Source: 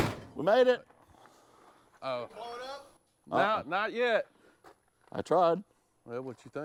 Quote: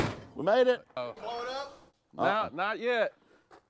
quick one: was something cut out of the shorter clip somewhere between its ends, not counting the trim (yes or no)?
yes